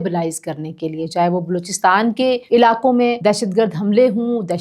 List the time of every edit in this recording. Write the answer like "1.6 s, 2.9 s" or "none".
2.4 s, 3.2 s